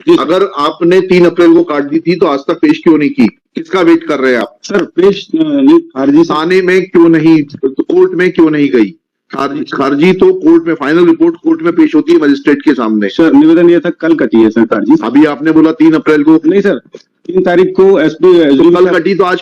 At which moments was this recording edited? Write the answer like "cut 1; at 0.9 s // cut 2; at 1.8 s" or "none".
none